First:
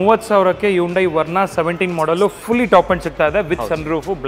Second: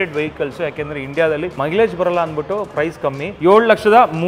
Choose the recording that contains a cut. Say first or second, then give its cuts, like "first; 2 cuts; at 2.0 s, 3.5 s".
second; 2 cuts; at 1.5 s, 3.3 s